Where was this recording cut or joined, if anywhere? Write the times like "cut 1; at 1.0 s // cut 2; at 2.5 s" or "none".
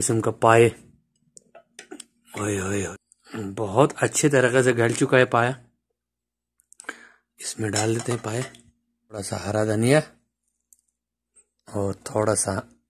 cut 1; at 2.9 s // cut 2; at 9.3 s